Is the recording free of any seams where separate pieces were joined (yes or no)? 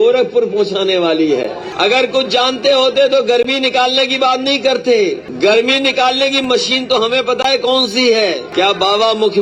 no